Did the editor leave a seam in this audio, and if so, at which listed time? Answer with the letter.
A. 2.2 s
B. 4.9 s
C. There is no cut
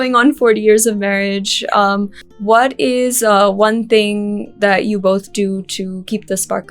A